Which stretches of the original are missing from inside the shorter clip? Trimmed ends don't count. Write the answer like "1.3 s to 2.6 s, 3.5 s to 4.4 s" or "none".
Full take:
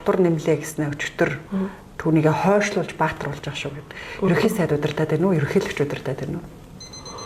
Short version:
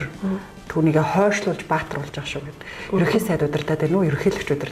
none